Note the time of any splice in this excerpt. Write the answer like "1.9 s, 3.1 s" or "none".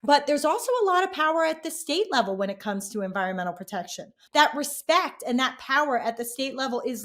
4.1 s